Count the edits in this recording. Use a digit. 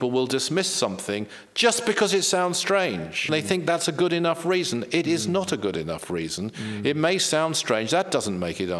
1